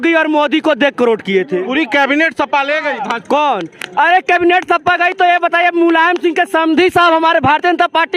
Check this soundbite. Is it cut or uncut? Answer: uncut